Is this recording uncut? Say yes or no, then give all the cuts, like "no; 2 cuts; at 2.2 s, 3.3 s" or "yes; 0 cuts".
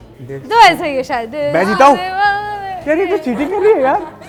yes; 0 cuts